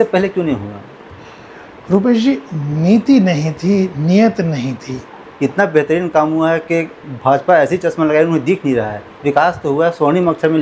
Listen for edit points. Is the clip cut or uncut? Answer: cut